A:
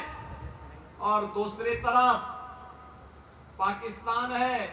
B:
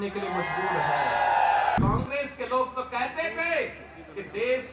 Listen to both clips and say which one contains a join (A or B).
B